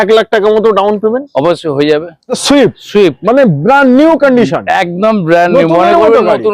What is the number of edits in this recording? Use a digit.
1